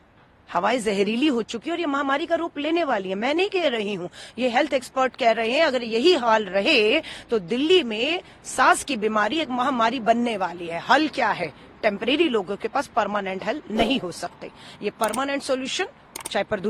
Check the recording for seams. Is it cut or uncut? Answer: uncut